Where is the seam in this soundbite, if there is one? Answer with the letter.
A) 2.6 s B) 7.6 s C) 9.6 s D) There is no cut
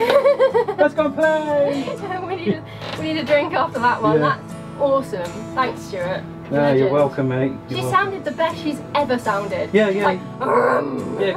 D